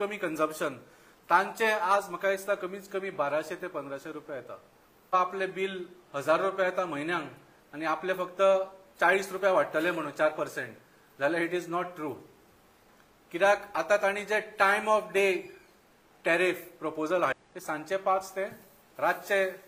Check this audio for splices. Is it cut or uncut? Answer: cut